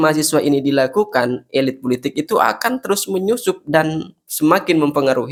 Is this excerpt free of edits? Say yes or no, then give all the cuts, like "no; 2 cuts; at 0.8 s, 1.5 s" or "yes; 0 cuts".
yes; 0 cuts